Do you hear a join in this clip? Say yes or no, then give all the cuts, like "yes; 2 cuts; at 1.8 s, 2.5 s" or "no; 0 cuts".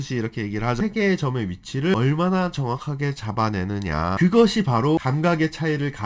yes; 3 cuts; at 1.9 s, 4.2 s, 5.0 s